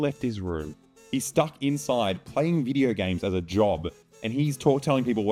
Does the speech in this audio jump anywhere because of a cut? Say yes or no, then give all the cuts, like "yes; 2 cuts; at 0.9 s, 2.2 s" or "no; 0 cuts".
no; 0 cuts